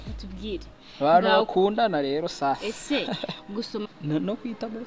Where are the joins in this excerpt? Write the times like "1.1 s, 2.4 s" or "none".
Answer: 3.8 s